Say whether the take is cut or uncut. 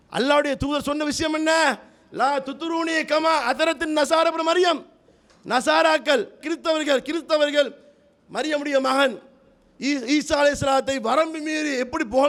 uncut